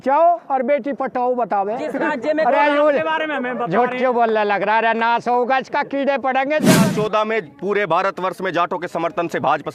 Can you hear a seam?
yes; 1 cut; at 6.8 s

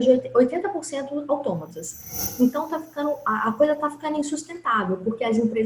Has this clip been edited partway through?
yes; 1 cut; at 2.2 s

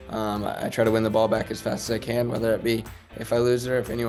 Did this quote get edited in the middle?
no; 0 cuts

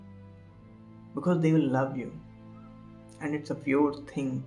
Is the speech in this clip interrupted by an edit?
no; 0 cuts

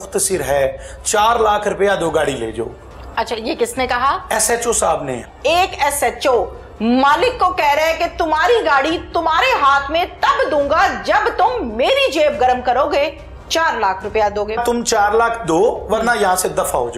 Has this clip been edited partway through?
yes; 2 cuts; at 5.2 s, 14.6 s

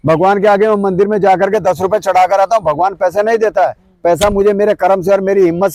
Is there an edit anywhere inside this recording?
no; 0 cuts

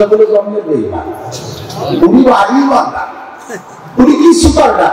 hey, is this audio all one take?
yes; 0 cuts

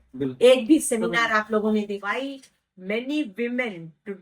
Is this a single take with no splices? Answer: no; 1 cut; at 2.0 s

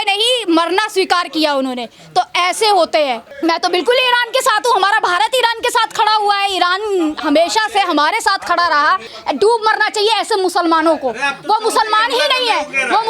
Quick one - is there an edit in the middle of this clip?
yes; 2 cuts; at 3.3 s, 9.1 s

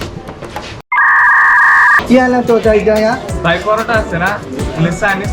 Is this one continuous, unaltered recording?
no; 1 cut; at 2.0 s

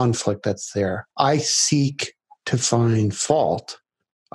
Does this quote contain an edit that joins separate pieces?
yes; 1 cut; at 1.0 s

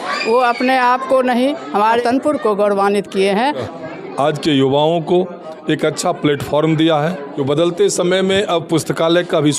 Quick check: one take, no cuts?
no; 3 cuts; at 2.0 s, 3.7 s, 7.2 s

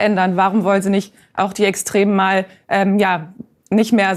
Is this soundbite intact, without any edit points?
yes; 0 cuts

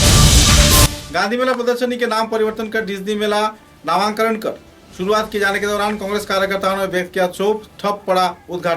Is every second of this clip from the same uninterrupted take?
no; 1 cut; at 1.0 s

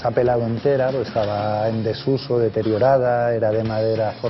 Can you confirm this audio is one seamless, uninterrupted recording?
yes; 0 cuts

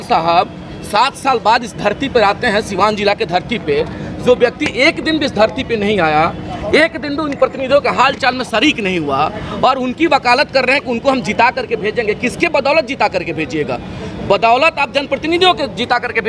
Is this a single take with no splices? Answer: yes; 0 cuts

